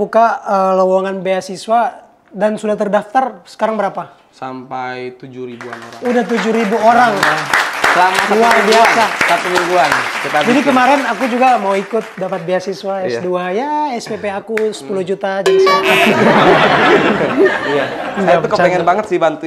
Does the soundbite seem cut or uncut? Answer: uncut